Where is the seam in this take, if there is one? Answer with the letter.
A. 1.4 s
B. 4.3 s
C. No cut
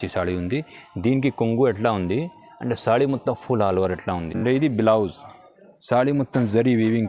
B